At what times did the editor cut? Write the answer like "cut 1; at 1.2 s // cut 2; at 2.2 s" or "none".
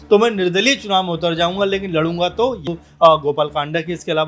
cut 1; at 2.7 s